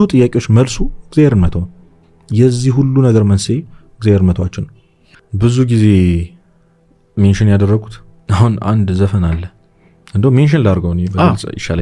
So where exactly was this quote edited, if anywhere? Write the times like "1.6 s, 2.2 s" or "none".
none